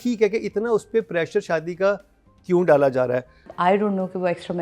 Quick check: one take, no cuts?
no; 1 cut; at 3.4 s

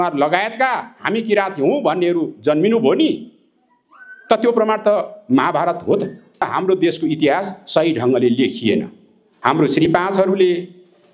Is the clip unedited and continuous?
no; 1 cut; at 6.5 s

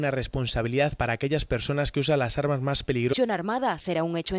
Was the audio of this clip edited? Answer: no; 0 cuts

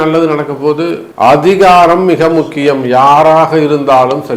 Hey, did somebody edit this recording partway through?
yes; 1 cut; at 1.0 s

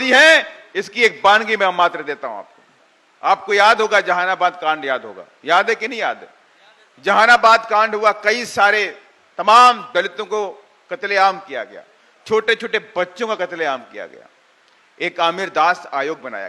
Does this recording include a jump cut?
no; 0 cuts

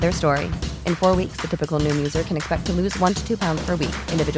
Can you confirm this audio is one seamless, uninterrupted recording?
yes; 0 cuts

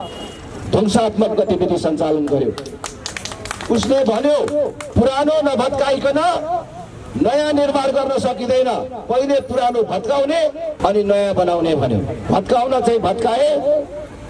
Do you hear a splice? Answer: yes; 3 cuts; at 4.8 s, 10.7 s, 12.1 s

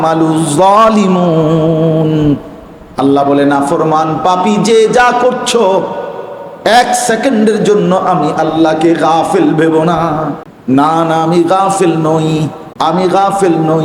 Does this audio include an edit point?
yes; 2 cuts; at 10.5 s, 12.6 s

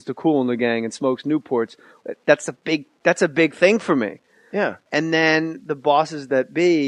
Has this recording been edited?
no; 0 cuts

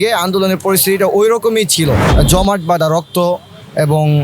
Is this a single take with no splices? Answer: no; 1 cut; at 2.1 s

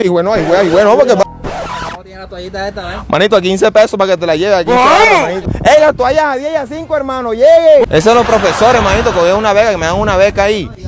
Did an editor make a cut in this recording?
yes; 3 cuts; at 1.2 s, 5.5 s, 7.8 s

